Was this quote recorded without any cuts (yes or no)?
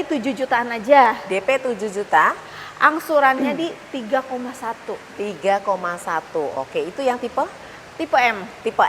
yes